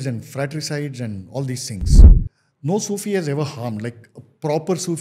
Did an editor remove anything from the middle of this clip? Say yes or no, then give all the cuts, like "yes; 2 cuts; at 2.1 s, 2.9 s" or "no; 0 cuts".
yes; 1 cut; at 2.1 s